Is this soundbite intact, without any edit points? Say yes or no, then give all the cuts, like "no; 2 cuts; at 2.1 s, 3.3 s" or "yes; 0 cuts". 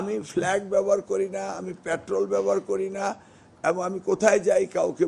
yes; 0 cuts